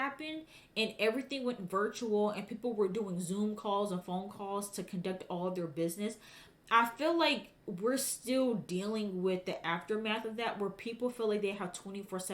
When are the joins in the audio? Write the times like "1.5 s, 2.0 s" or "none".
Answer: none